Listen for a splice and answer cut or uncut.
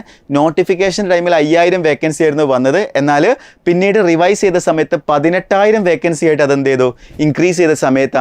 uncut